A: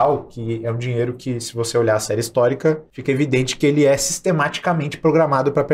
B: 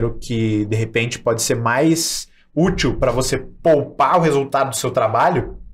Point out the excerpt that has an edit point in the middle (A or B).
A